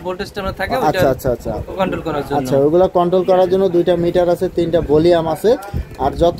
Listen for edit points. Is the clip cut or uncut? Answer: uncut